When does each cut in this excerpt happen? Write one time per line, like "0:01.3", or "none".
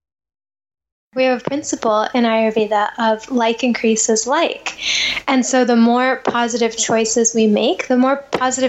0:01.1